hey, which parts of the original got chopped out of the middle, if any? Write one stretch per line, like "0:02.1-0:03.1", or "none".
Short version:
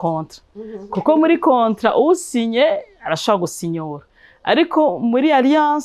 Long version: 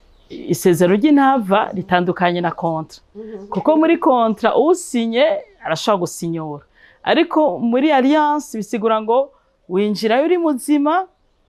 none

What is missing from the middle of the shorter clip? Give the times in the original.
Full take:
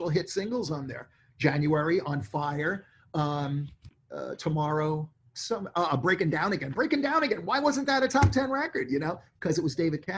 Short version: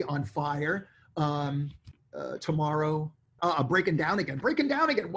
0:05.3-0:05.7

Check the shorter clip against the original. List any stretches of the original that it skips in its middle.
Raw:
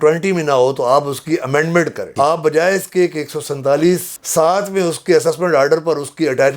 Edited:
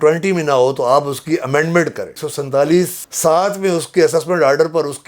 0:02.1-0:03.2

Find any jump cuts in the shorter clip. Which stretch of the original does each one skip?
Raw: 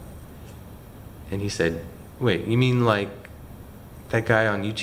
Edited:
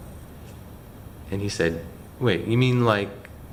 none

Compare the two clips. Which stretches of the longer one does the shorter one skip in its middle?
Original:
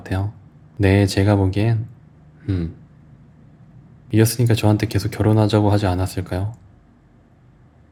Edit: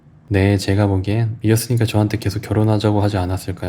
0:01.8-0:04.0

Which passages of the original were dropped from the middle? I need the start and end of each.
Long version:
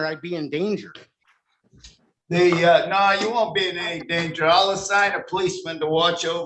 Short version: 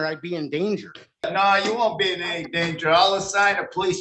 0:01.3-0:02.8

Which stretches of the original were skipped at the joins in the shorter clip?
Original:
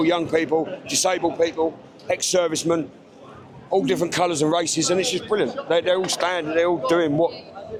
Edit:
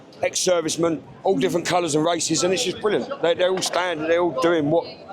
0:03.0-0:03.6

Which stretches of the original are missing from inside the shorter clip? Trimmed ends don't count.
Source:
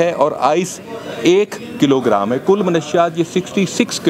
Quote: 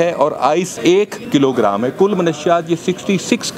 0:01.1-0:01.6

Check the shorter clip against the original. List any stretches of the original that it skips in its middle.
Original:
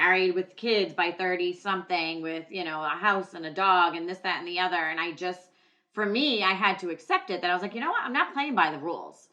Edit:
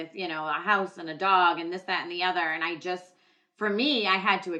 none

